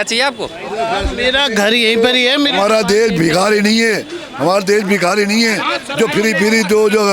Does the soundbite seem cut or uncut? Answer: uncut